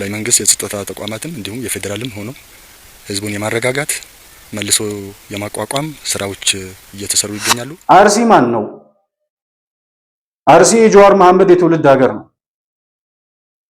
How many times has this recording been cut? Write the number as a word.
one